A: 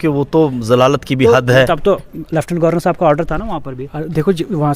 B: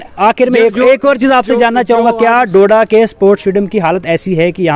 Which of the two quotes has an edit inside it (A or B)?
A